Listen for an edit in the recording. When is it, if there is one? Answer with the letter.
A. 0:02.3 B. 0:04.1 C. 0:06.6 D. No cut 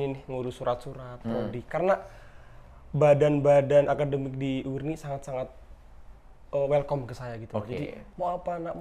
D